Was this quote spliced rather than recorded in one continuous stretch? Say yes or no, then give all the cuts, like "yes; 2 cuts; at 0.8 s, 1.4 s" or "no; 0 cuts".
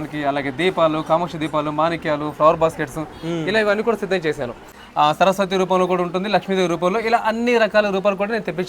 yes; 1 cut; at 4.8 s